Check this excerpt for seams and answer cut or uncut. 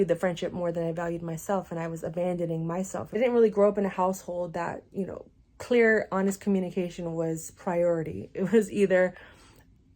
cut